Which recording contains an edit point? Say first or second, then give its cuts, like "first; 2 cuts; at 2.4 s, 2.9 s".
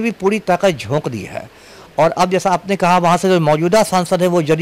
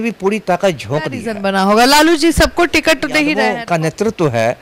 second; 2 cuts; at 1.3 s, 3.5 s